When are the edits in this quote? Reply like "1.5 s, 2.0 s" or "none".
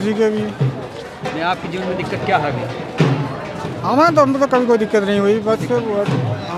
none